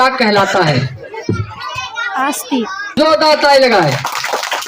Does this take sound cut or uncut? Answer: cut